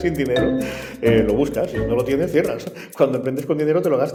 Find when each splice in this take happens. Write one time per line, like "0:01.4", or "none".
none